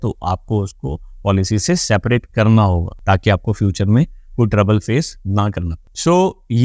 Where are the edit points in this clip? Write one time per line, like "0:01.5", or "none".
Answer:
none